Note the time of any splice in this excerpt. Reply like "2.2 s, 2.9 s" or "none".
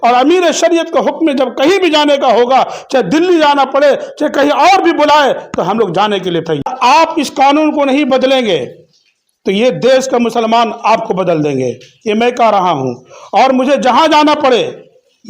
6.7 s